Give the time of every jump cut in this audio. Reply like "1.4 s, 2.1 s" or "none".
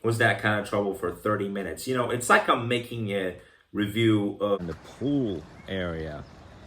4.6 s